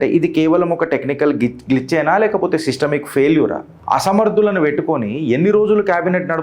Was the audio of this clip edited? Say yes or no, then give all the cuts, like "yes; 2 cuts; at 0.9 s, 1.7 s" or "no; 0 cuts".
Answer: yes; 1 cut; at 3.7 s